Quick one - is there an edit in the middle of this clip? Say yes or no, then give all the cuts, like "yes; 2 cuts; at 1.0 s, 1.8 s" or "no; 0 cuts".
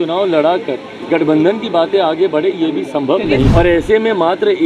yes; 1 cut; at 3.5 s